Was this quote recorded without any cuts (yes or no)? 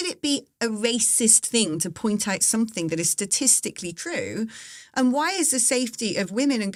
yes